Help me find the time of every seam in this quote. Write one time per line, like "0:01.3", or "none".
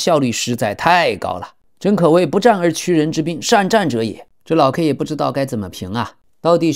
0:04.3